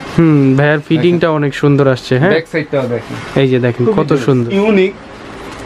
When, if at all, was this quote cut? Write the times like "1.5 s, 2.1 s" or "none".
4.5 s